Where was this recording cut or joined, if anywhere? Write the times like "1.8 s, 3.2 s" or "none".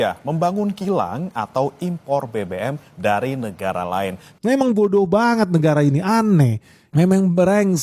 4.4 s